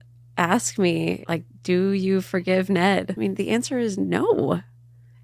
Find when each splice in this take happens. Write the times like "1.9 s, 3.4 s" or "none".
1.2 s, 3.1 s